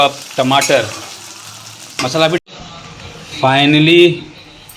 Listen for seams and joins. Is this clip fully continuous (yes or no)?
no